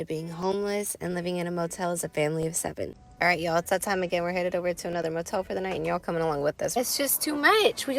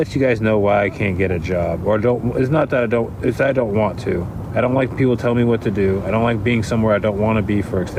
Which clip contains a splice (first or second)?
first